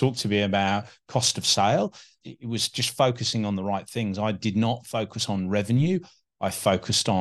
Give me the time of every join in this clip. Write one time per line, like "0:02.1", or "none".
0:02.3